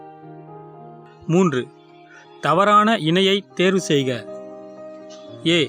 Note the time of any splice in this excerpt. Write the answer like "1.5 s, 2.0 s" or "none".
0.9 s